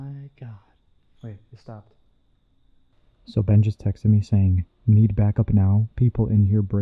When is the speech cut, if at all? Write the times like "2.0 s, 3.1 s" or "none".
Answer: 3.0 s